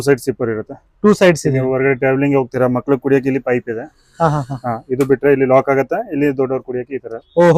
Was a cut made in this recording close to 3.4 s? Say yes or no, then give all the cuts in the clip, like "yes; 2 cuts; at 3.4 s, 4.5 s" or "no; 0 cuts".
no; 0 cuts